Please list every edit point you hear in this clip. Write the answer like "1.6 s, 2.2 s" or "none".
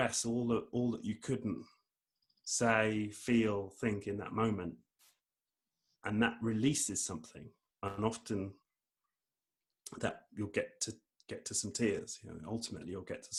none